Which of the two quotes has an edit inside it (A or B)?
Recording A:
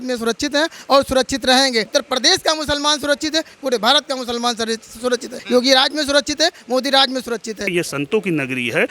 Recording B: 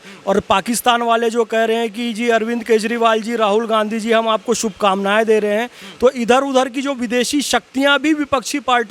A